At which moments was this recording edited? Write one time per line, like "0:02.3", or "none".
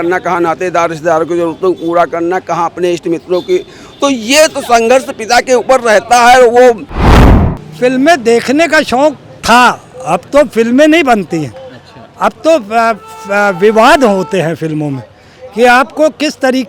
0:07.1